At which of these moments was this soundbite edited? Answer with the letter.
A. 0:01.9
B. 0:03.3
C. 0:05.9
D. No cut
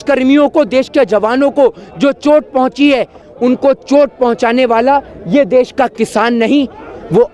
B